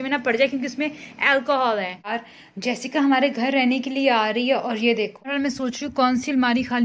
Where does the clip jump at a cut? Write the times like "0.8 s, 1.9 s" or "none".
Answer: 2.1 s, 5.3 s

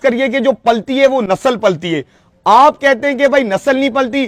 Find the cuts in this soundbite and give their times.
none

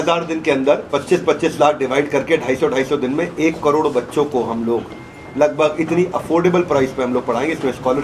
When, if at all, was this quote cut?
none

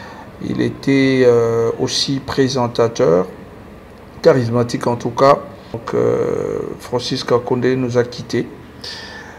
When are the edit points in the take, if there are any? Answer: 5.8 s

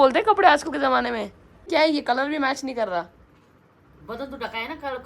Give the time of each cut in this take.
1.7 s

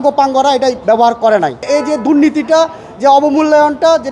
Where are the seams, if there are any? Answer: 1.7 s

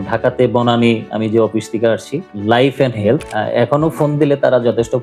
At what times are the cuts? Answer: 3.2 s

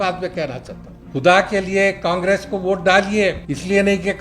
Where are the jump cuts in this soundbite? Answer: 1.0 s

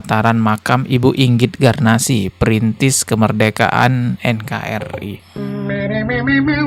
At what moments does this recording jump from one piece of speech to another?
5.1 s

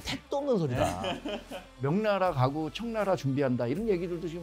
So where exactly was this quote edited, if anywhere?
1.8 s

